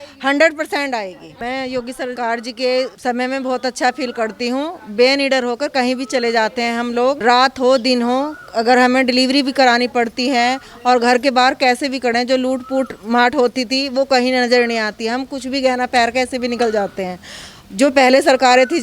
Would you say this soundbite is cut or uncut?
cut